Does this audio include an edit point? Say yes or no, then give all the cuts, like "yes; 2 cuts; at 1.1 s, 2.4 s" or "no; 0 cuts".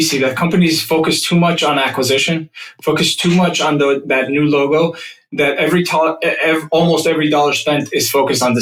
no; 0 cuts